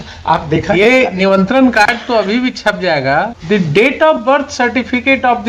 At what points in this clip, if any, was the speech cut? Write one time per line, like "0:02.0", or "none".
0:03.3